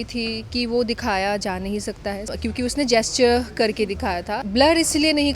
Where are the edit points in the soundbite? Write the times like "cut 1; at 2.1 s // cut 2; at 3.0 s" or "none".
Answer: cut 1; at 2.3 s // cut 2; at 4.4 s